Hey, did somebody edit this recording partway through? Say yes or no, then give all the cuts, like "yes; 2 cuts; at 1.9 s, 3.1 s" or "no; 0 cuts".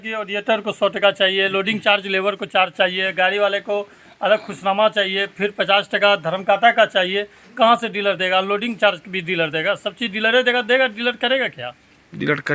no; 0 cuts